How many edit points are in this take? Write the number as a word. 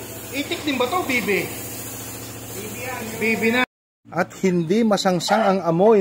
one